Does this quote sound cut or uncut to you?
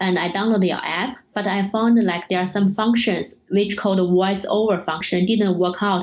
cut